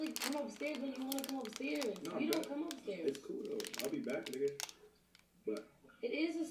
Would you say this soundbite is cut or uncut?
uncut